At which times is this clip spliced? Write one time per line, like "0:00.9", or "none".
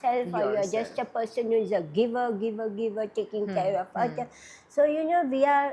none